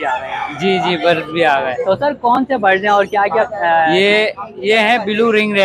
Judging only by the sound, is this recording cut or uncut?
uncut